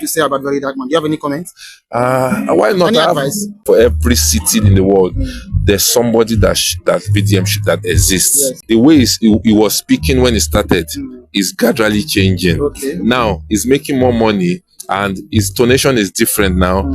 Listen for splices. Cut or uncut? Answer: cut